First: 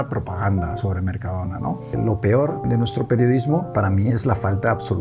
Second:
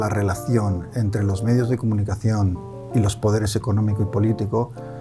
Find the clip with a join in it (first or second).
first